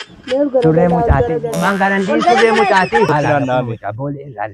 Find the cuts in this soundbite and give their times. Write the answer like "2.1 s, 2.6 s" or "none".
3.1 s